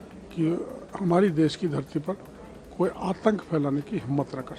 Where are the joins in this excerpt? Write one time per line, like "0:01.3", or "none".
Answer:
none